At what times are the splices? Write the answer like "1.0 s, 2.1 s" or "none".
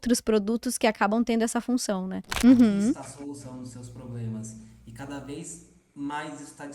2.2 s